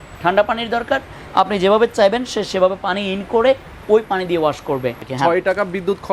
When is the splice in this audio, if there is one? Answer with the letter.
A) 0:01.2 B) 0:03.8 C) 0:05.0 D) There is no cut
C